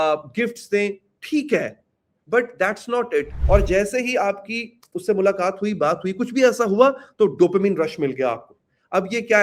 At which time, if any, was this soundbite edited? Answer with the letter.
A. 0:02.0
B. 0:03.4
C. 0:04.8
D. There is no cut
B